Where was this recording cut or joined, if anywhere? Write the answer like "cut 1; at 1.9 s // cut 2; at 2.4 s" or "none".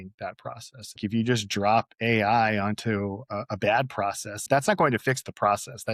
cut 1; at 1.0 s // cut 2; at 4.4 s